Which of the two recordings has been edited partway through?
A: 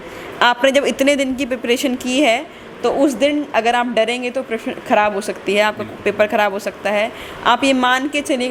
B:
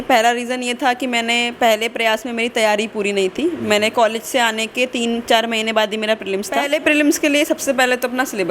B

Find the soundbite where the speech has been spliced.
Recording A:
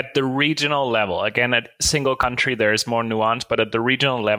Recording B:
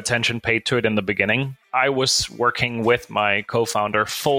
B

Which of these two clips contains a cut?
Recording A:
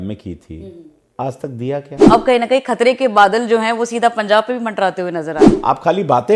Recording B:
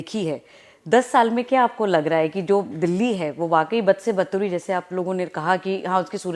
A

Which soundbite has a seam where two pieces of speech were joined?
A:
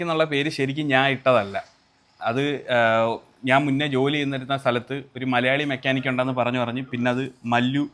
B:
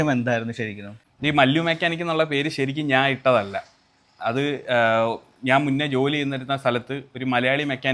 B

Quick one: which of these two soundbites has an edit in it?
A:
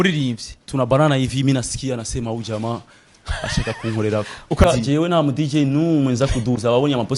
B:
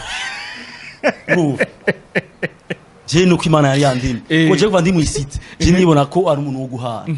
A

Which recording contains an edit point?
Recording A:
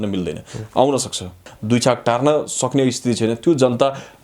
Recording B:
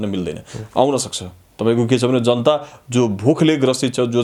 A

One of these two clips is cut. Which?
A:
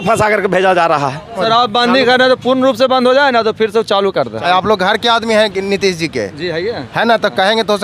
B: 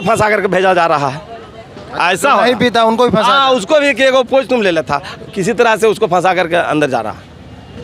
A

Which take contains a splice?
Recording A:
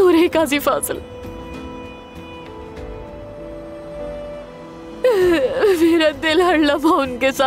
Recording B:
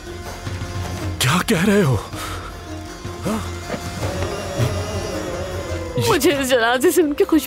B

